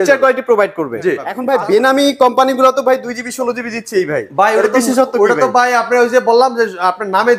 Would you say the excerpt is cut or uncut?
cut